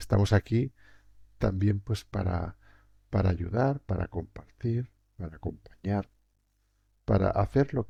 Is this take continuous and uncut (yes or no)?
yes